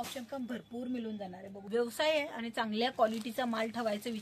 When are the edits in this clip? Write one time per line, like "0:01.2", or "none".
0:01.5